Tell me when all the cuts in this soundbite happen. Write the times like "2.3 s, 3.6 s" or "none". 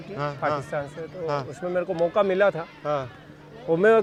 none